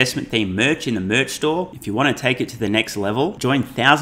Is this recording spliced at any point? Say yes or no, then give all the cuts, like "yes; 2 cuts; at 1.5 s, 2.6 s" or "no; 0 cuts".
no; 0 cuts